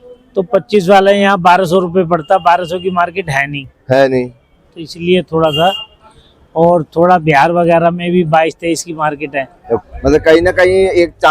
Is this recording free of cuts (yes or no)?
no